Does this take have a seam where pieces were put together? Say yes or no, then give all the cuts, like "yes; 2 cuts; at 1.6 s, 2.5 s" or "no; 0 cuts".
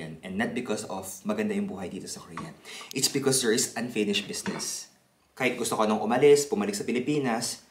yes; 1 cut; at 5.1 s